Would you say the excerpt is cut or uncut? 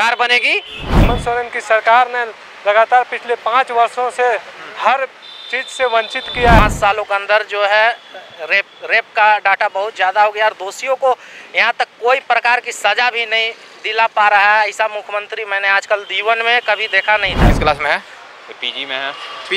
cut